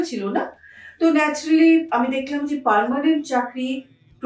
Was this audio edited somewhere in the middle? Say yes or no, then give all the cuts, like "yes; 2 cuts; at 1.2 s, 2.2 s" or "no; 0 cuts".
no; 0 cuts